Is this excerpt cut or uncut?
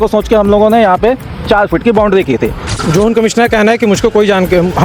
cut